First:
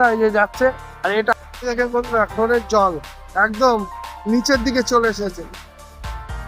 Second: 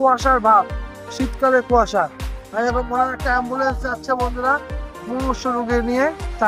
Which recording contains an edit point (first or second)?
first